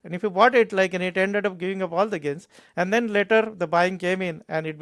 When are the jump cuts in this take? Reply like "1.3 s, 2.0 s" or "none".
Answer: none